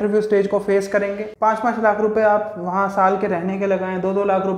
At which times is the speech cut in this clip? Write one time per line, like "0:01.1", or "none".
0:01.3